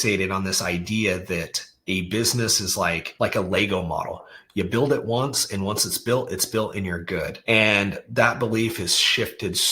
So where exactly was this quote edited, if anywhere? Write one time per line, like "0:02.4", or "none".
0:03.1
0:07.3